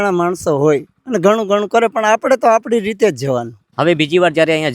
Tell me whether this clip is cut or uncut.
cut